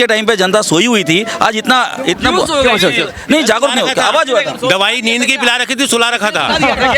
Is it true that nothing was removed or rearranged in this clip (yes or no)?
yes